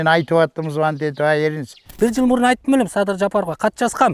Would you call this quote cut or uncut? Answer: cut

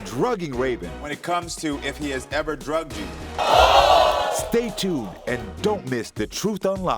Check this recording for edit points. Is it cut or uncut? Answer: cut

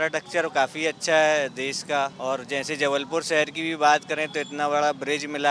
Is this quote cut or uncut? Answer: cut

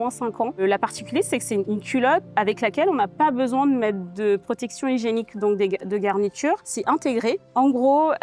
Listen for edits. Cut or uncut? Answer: uncut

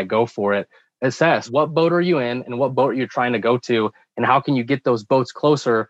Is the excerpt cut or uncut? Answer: uncut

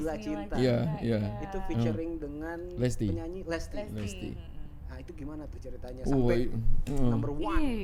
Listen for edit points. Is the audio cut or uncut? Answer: uncut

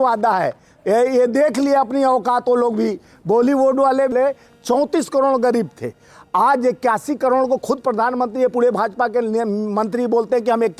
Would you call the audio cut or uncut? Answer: cut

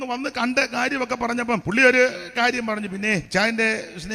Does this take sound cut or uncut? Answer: cut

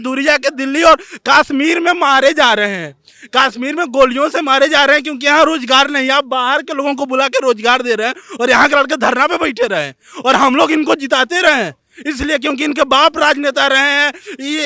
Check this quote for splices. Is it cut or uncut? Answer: uncut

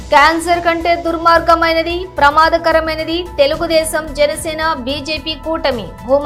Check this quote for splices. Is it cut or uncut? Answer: uncut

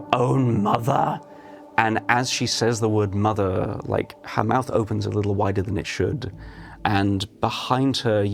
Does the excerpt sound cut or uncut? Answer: cut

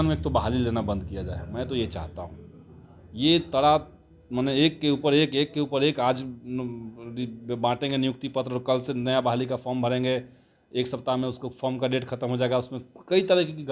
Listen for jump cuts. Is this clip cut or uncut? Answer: uncut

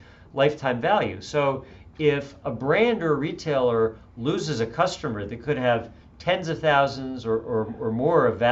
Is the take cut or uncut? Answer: uncut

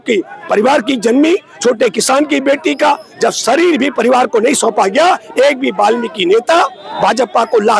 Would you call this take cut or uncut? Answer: uncut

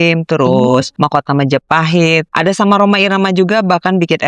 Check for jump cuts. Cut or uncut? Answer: cut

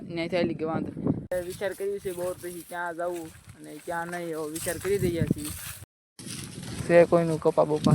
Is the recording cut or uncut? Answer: cut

